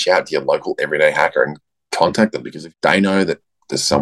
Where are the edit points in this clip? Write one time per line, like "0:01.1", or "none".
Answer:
none